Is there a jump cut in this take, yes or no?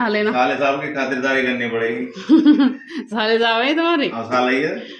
no